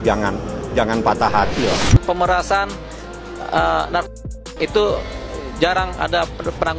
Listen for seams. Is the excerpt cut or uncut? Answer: cut